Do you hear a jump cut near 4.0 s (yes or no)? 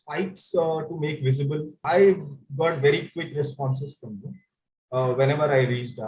no